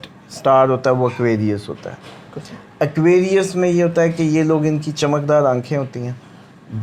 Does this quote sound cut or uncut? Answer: uncut